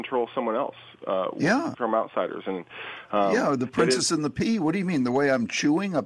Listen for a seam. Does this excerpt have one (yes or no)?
yes